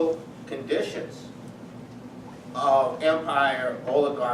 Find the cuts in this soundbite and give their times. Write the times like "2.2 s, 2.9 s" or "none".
3.2 s